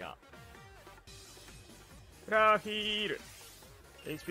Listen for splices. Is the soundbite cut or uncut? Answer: cut